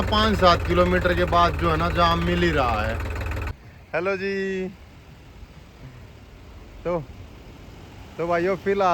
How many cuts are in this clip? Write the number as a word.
one